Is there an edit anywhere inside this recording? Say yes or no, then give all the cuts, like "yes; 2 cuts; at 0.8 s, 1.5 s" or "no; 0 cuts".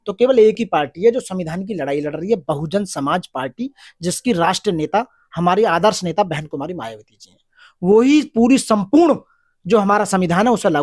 no; 0 cuts